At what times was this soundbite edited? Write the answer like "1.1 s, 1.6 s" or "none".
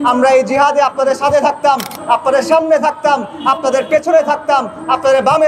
none

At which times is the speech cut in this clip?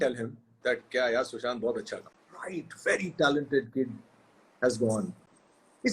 2.7 s

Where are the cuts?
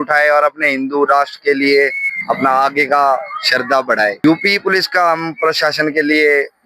4.2 s

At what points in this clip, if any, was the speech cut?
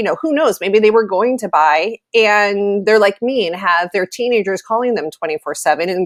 none

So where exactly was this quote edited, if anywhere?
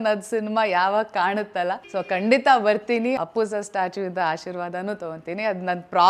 1.8 s, 3.2 s

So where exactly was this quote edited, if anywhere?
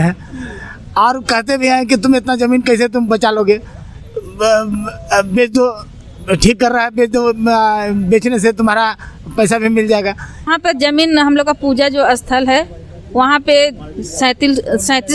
10.5 s

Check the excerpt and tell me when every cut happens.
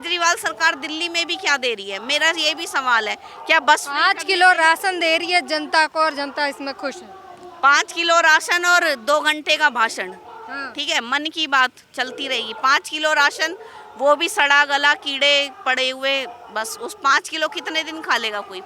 none

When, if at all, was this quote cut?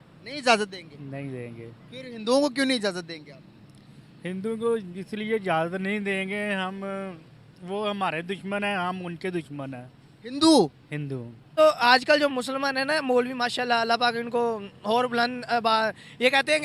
11.5 s

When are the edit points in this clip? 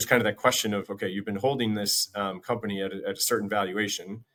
none

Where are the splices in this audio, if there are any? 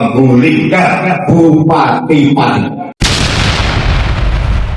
2.9 s

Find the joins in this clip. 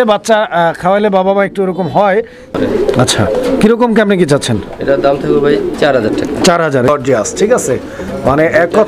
2.6 s, 6.9 s

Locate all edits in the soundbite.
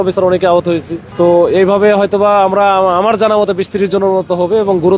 1.0 s

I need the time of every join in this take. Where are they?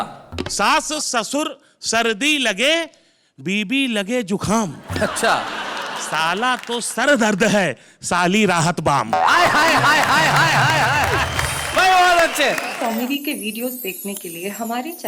12.7 s

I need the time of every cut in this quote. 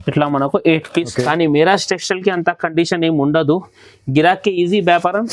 1.1 s

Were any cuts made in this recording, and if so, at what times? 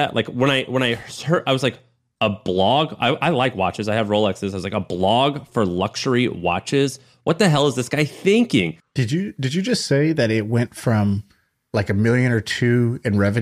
8.9 s

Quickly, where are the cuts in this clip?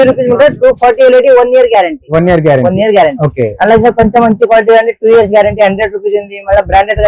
none

